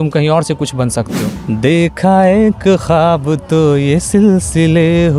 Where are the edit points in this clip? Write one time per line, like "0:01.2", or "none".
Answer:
0:01.3

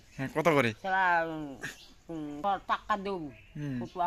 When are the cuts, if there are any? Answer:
0:02.4

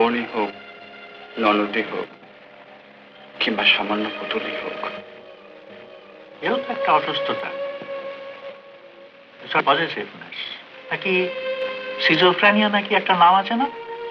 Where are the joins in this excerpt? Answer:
none

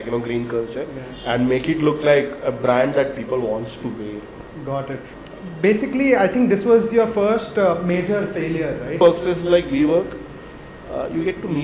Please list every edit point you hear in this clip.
0:05.2
0:09.0

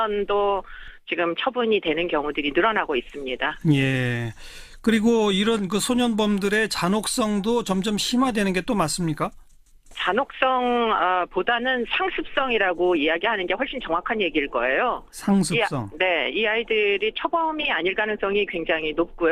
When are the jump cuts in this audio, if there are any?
0:12.3

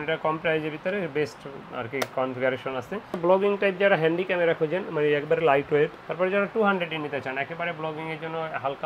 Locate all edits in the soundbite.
0:03.0
0:06.0

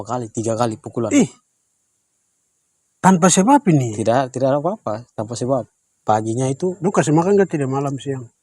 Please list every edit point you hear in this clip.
0:06.0

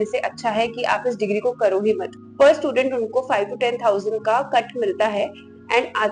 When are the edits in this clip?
0:02.2

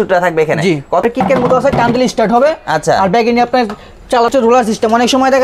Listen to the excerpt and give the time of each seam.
0:01.0
0:04.3

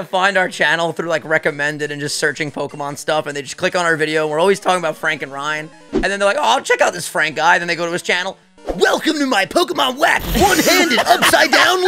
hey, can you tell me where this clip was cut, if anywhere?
none

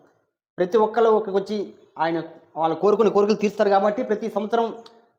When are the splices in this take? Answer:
none

